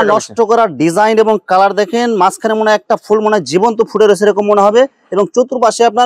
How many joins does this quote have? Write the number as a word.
zero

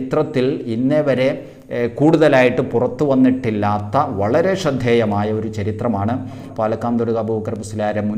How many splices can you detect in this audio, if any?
one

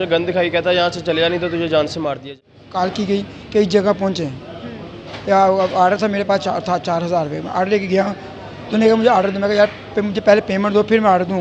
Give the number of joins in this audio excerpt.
one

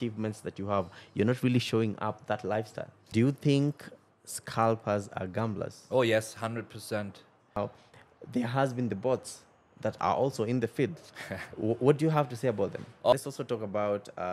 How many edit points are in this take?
three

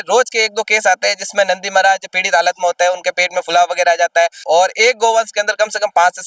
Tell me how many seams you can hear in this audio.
one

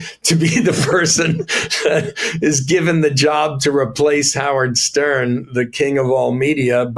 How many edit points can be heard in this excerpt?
zero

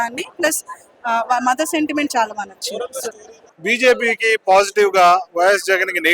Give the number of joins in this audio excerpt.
one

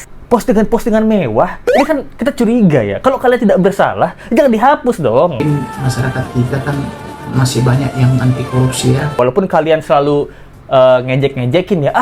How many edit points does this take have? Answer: two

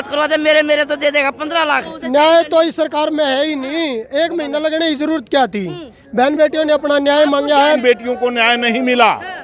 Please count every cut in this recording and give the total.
two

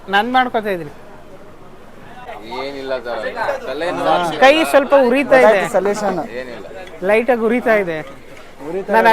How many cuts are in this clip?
one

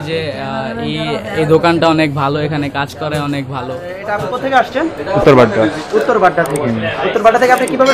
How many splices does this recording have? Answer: one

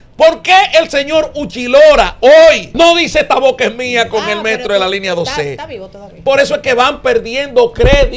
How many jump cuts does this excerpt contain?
two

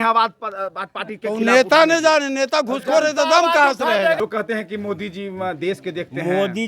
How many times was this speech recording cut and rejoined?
one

